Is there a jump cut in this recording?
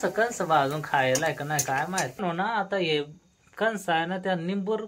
yes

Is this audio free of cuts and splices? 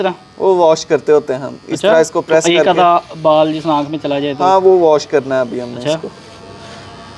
yes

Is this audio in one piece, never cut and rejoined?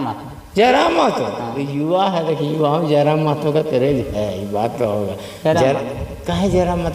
yes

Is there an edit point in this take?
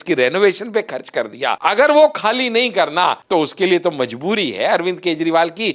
yes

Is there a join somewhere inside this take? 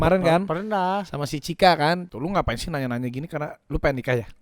yes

